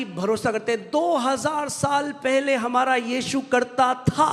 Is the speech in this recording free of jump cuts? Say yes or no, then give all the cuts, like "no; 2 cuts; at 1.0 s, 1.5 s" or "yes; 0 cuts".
yes; 0 cuts